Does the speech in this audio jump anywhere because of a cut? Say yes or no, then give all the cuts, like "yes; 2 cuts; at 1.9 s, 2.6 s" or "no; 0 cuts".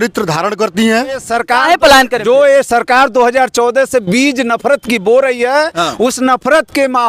yes; 1 cut; at 1.3 s